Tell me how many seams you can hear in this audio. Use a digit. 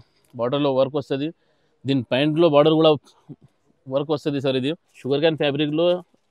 1